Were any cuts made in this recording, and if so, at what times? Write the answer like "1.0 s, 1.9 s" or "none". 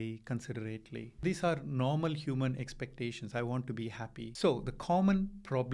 1.2 s, 4.2 s

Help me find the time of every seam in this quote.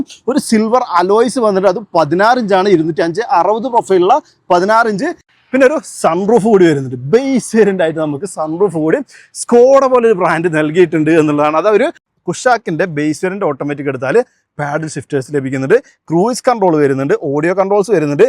5.3 s, 12.1 s

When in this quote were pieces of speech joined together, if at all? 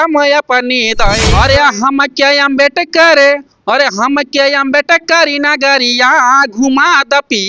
1.3 s

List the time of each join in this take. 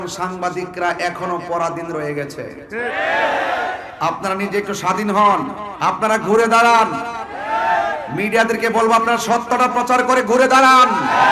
3.9 s, 5.6 s

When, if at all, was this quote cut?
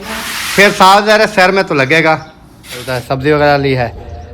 2.9 s

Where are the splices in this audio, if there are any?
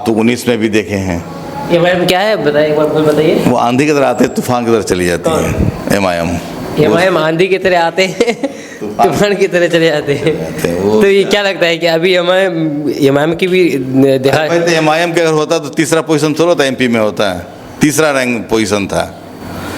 none

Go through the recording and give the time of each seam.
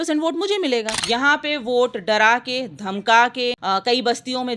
1.0 s, 3.6 s

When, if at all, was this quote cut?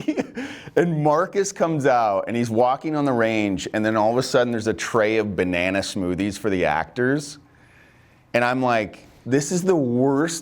9.1 s

